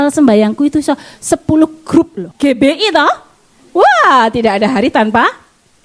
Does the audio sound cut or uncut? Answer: cut